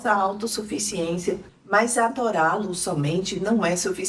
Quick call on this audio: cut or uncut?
cut